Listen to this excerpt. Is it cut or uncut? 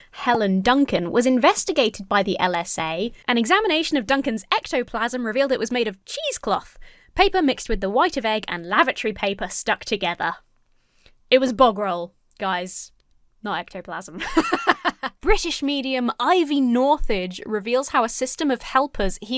cut